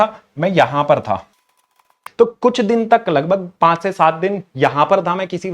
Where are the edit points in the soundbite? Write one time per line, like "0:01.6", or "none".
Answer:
0:02.0